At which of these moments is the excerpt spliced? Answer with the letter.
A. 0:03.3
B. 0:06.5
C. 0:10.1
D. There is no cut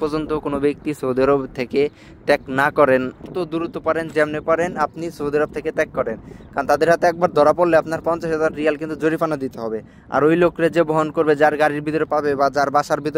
A